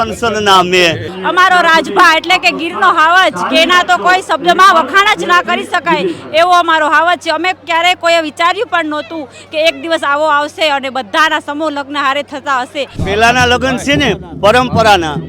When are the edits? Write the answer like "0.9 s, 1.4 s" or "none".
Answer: 1.1 s, 13.0 s